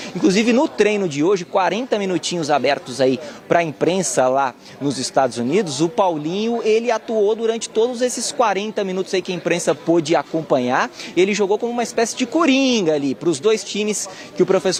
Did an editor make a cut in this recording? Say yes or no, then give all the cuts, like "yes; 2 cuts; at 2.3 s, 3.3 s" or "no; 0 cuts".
no; 0 cuts